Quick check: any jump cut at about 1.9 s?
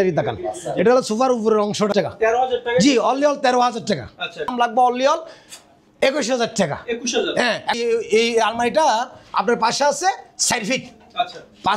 yes; 3 cuts; at 1.9 s, 4.5 s, 7.7 s

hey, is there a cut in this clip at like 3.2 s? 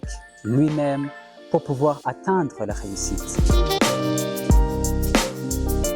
yes; 1 cut; at 3.2 s

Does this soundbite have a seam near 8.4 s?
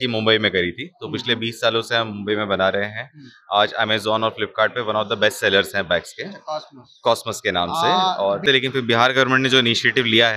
yes; 1 cut; at 8.4 s

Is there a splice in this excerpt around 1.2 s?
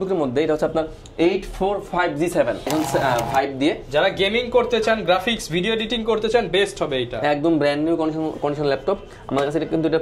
no; 1 cut; at 2.7 s

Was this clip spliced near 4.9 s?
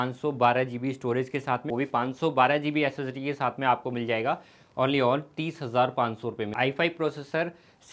no; 2 cuts; at 1.7 s, 6.5 s

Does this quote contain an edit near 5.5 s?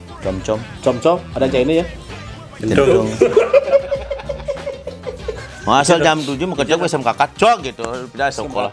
yes; 1 cut; at 5.5 s

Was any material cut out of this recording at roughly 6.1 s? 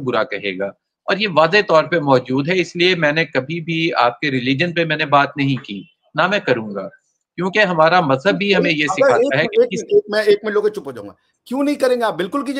no; 0 cuts

